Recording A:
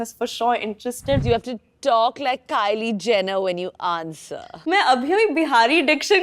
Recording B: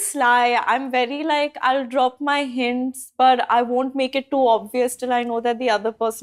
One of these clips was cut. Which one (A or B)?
A